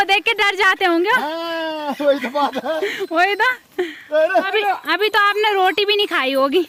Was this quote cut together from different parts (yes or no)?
no